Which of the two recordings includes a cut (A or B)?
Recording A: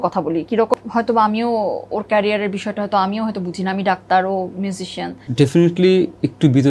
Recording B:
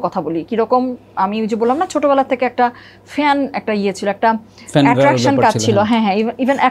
A